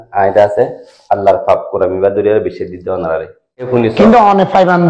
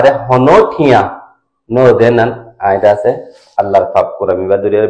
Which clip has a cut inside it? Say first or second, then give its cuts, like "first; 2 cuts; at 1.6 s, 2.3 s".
first; 1 cut; at 3.7 s